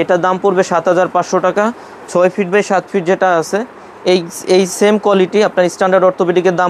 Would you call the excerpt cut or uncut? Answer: uncut